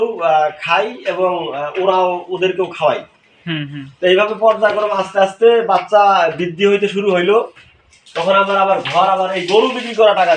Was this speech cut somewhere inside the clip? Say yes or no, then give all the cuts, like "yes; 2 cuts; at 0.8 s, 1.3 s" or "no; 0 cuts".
no; 0 cuts